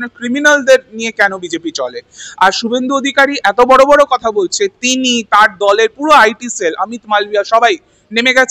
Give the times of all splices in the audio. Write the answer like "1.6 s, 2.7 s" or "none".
none